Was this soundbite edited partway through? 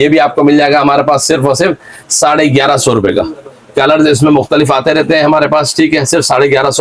no; 0 cuts

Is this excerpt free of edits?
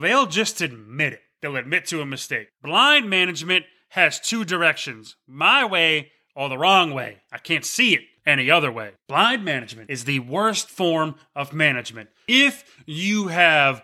no; 1 cut; at 8.9 s

